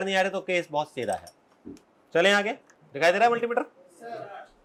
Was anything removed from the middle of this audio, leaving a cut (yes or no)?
no